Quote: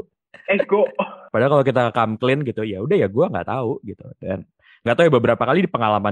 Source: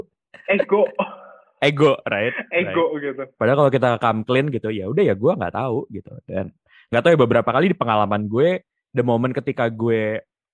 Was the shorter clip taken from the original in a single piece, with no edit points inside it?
no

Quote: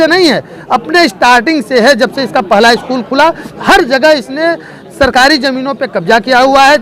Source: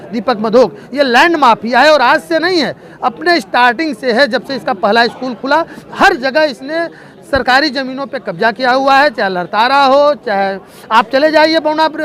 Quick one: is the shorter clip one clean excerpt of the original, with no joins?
yes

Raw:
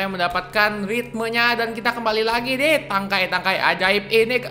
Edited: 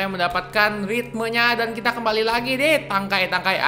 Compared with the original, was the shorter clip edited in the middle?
no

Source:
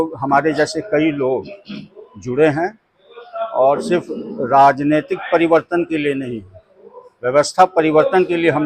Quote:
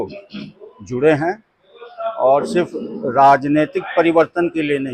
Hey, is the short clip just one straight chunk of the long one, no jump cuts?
yes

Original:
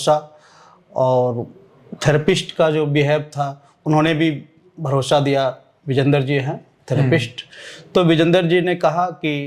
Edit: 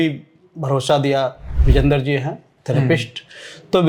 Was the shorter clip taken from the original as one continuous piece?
yes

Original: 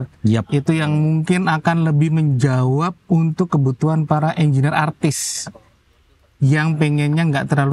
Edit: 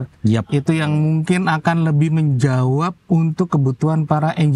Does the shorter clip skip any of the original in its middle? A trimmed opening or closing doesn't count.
no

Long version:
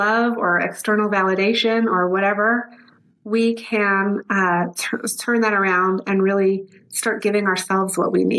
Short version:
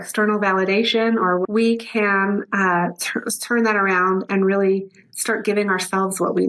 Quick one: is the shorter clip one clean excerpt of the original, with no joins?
no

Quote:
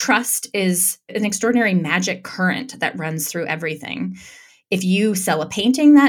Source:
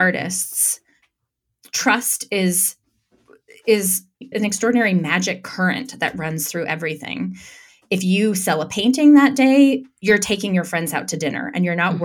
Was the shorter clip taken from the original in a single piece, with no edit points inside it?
no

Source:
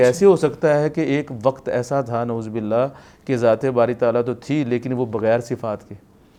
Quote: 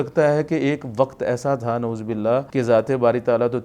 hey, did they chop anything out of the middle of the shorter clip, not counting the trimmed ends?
yes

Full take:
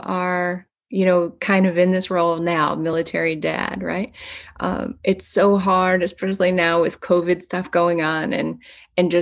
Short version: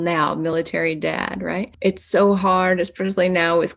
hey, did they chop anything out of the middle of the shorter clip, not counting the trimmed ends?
yes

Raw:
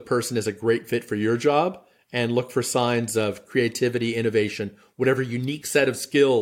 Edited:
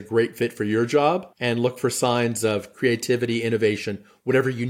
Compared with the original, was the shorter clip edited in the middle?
yes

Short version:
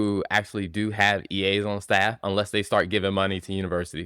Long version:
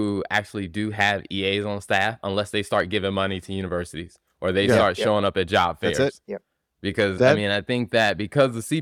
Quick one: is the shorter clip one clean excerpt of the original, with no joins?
yes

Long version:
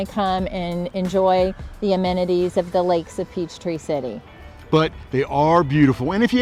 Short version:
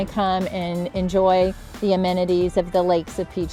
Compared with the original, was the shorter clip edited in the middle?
no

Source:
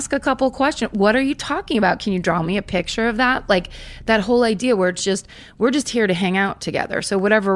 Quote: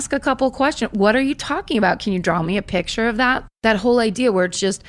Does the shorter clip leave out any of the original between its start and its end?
yes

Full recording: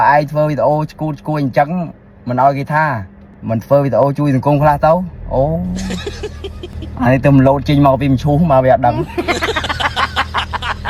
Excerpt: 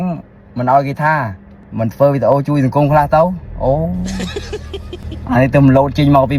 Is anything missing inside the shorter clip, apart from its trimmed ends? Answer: no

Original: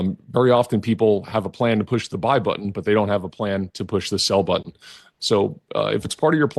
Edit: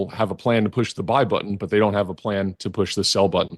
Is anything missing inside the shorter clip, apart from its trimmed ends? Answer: no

